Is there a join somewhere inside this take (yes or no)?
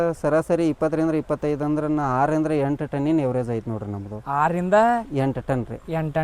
no